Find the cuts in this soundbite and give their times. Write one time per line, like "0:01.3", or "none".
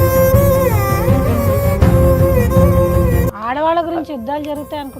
0:03.3